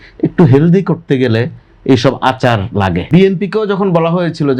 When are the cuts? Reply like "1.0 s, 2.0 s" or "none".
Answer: 3.1 s